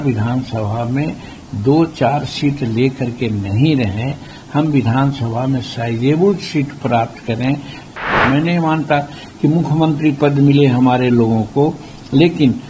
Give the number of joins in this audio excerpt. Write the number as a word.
one